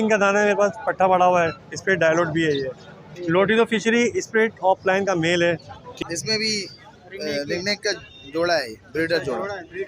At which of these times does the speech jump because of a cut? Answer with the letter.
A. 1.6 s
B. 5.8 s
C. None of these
B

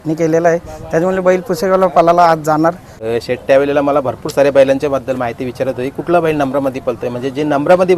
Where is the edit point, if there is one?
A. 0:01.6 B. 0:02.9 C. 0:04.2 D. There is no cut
B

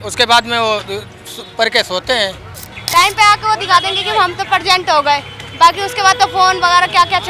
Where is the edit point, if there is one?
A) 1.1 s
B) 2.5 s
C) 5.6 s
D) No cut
B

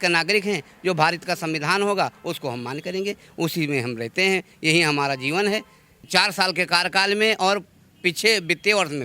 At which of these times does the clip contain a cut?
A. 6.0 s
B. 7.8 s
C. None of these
A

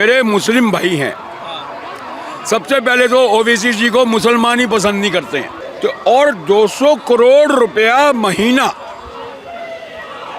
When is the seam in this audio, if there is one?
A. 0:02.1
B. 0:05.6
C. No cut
B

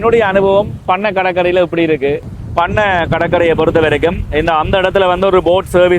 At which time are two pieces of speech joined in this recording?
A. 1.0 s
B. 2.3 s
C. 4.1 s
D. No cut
B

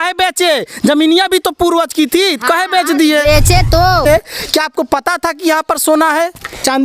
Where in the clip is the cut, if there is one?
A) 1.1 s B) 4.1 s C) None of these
B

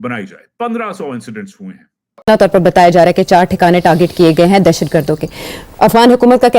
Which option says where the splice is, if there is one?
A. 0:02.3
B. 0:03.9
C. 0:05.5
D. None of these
A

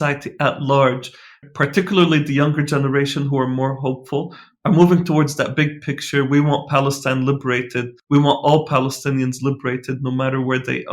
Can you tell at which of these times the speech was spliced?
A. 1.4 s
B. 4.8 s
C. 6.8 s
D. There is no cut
A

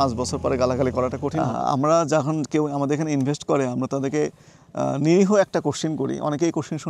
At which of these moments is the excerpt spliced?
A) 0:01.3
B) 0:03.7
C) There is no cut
A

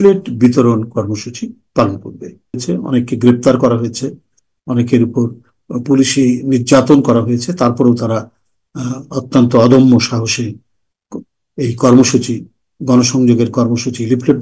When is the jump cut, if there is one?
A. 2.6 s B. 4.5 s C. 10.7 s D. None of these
A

